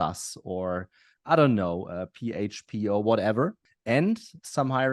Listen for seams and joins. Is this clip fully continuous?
no; 1 cut; at 3.6 s

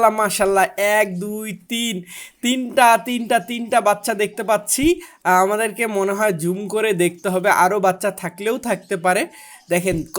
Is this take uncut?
yes; 0 cuts

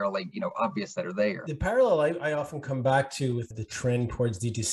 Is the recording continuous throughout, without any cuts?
no; 2 cuts; at 1.4 s, 3.6 s

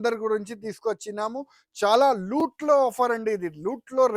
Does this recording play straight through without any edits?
yes; 0 cuts

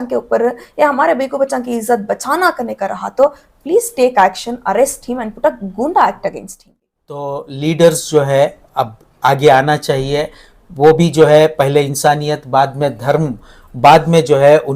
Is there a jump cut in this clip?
yes; 1 cut; at 7.4 s

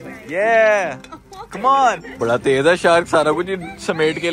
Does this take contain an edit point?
yes; 1 cut; at 2.1 s

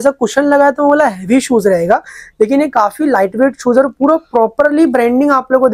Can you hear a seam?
no; 0 cuts

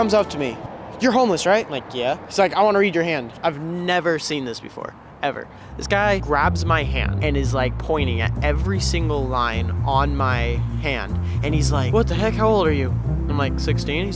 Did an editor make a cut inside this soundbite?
no; 0 cuts

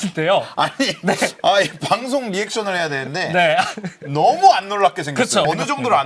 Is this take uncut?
yes; 0 cuts

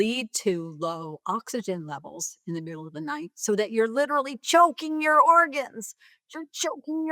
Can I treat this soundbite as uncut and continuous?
yes; 0 cuts

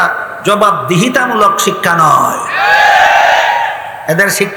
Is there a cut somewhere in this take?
no; 0 cuts

